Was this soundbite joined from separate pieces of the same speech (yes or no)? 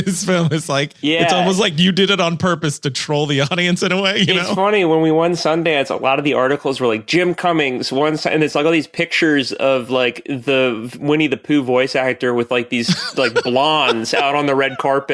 yes